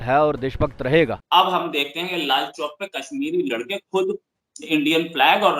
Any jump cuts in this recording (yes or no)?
yes